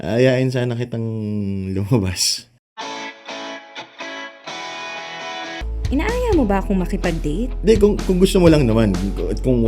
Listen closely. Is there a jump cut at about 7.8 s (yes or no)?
no